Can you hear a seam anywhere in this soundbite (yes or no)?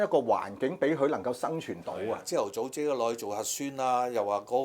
yes